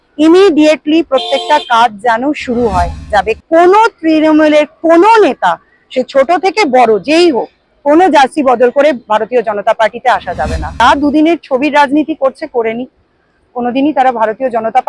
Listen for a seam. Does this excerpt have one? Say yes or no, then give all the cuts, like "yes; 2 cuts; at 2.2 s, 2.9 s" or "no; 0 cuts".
yes; 2 cuts; at 3.1 s, 10.7 s